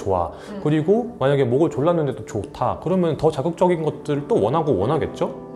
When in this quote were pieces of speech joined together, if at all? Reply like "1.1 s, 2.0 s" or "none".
none